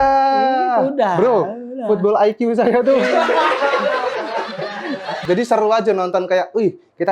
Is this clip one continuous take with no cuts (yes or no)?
no